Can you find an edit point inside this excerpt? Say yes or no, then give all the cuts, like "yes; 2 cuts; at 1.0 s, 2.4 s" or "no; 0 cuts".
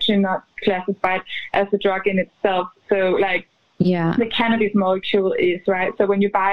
no; 0 cuts